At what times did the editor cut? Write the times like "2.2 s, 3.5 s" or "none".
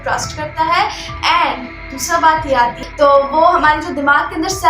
2.8 s